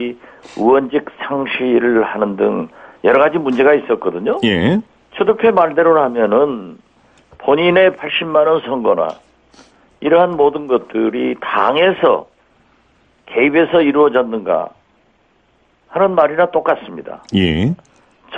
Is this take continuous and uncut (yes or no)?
yes